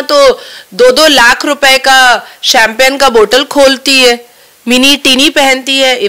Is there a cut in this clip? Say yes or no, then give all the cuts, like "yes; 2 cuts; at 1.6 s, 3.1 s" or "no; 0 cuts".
no; 0 cuts